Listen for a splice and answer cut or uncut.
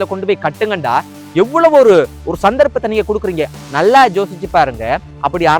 cut